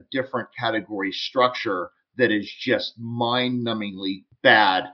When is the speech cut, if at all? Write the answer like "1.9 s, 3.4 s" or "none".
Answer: none